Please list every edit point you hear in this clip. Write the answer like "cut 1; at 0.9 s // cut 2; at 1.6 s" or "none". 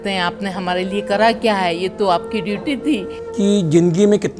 cut 1; at 3.2 s